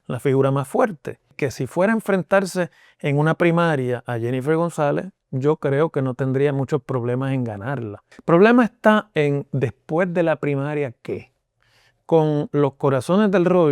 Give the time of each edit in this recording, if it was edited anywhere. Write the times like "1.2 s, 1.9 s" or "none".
1.3 s, 8.0 s

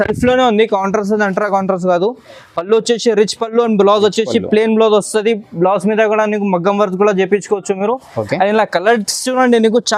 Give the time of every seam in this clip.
none

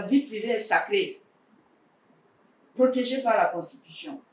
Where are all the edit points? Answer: none

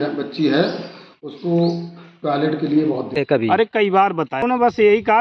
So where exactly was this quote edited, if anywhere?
3.2 s, 4.4 s

